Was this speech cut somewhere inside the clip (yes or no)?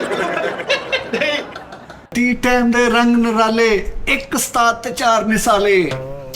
yes